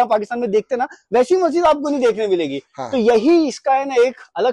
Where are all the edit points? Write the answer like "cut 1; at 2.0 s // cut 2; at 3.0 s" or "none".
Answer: none